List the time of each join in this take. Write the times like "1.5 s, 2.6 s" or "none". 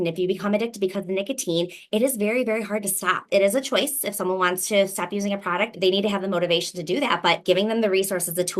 3.2 s, 5.7 s, 7.4 s